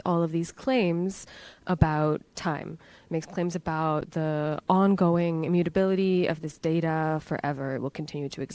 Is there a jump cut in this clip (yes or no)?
no